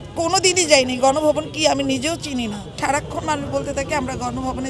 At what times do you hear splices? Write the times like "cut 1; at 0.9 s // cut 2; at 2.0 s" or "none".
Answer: cut 1; at 2.8 s